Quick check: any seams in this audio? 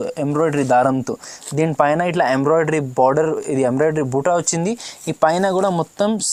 no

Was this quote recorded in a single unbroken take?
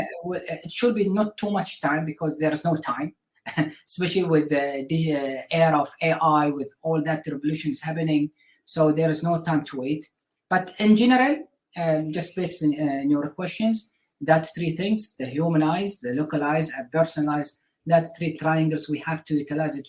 yes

